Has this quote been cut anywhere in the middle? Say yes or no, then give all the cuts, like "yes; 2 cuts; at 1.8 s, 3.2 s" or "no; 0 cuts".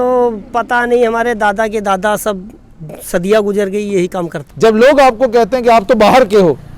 yes; 1 cut; at 4.4 s